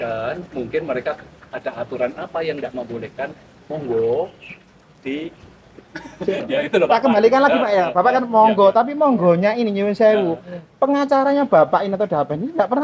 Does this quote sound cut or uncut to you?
uncut